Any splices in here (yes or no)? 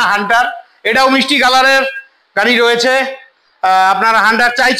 no